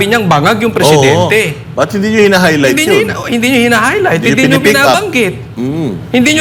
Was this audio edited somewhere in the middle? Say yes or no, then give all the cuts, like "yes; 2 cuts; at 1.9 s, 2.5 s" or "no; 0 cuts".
no; 0 cuts